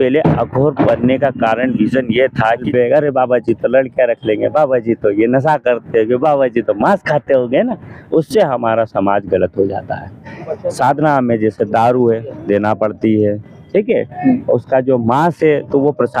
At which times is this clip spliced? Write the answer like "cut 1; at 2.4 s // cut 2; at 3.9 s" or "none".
cut 1; at 2.7 s // cut 2; at 10.4 s